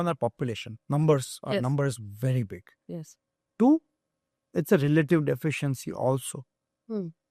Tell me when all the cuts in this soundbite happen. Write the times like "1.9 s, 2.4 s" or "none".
none